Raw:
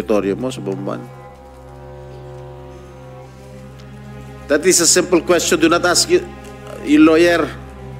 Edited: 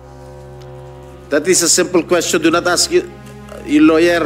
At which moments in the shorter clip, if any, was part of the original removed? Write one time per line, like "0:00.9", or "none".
0:01.3